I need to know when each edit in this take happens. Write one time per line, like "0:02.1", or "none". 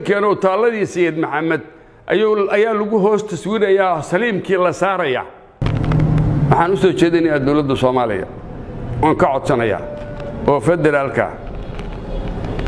0:05.7